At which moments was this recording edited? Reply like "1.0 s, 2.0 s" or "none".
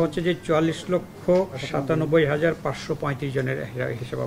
1.6 s